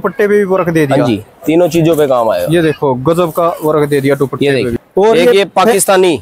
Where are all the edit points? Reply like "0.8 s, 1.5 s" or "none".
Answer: 4.7 s